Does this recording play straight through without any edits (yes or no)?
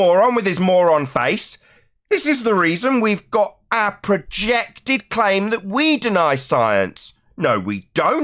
yes